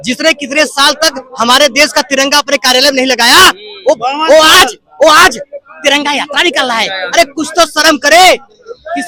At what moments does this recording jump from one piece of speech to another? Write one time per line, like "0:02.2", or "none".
none